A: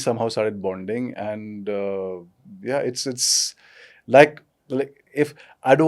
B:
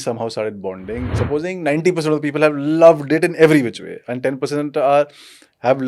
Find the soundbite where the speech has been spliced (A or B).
B